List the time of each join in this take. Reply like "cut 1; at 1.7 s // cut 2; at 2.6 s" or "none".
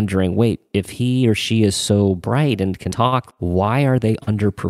cut 1; at 3.3 s